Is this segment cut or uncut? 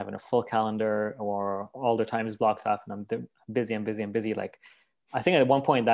uncut